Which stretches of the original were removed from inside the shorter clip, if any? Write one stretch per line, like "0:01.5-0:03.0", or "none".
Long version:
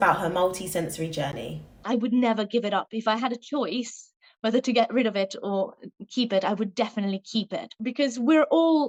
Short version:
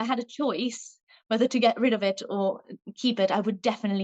none